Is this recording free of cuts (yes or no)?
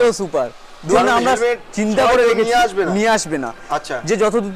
no